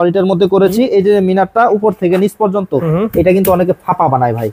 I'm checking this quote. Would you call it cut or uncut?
uncut